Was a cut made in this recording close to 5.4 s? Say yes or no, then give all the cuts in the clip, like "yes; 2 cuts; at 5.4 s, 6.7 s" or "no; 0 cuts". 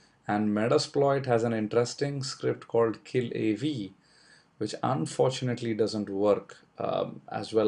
yes; 1 cut; at 5.4 s